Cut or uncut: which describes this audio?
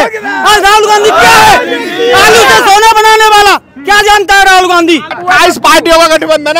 cut